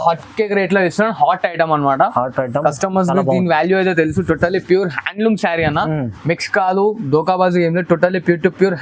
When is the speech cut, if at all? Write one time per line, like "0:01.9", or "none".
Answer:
none